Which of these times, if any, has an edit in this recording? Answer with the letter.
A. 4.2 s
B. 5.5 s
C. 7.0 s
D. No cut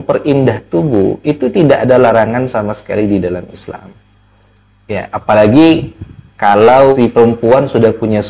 C